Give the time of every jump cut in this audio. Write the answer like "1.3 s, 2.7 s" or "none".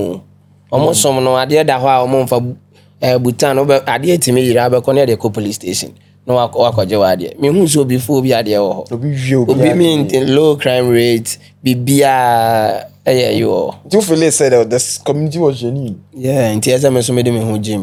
none